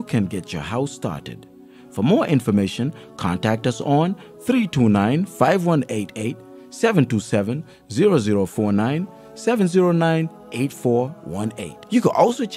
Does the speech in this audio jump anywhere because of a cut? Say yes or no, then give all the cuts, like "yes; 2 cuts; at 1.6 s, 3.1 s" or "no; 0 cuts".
no; 0 cuts